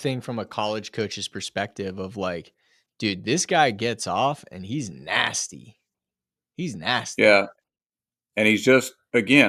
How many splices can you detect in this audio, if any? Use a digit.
0